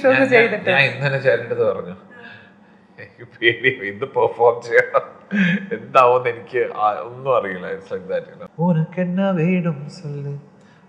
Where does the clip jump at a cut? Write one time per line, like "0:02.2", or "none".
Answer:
0:08.4